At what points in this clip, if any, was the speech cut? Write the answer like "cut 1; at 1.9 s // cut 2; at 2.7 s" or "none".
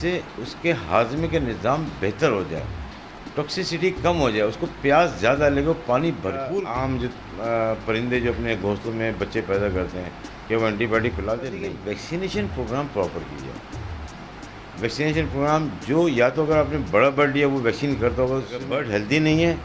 cut 1; at 6.5 s // cut 2; at 11.6 s // cut 3; at 18.7 s